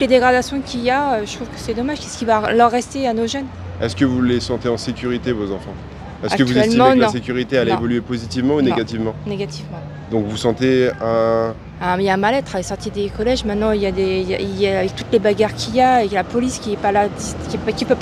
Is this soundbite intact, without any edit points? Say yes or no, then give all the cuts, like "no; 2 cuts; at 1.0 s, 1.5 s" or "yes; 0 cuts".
yes; 0 cuts